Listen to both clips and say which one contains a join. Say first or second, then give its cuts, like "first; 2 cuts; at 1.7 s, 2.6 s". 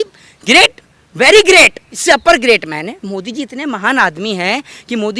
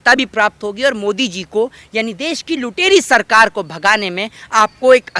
first; 1 cut; at 1.9 s